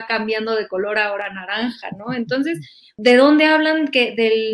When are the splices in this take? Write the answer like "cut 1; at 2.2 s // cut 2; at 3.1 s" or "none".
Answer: cut 1; at 2.9 s